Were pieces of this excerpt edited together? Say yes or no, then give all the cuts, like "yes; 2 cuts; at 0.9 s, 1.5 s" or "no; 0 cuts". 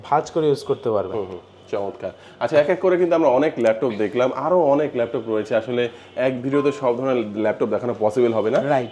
no; 0 cuts